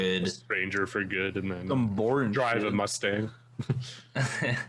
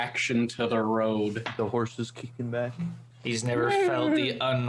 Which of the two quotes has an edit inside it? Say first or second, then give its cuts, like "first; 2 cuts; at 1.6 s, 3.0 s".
second; 1 cut; at 3.1 s